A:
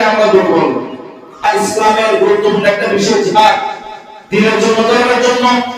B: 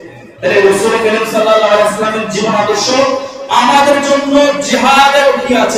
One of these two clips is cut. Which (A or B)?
A